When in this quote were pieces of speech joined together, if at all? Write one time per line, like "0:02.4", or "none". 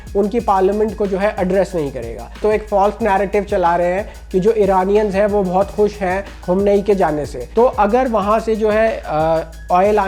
0:02.4
0:07.4